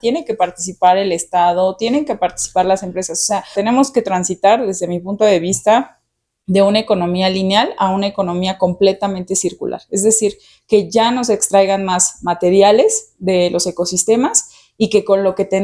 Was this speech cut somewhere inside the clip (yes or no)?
yes